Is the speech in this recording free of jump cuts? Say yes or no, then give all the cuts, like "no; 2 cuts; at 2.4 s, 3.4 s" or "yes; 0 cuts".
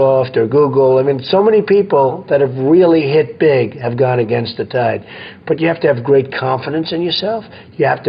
yes; 0 cuts